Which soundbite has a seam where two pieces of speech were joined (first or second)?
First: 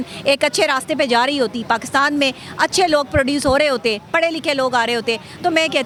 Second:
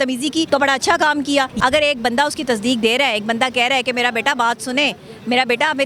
second